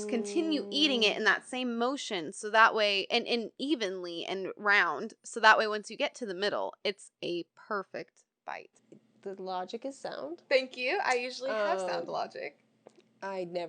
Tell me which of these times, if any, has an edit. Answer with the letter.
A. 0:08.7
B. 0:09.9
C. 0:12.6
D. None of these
A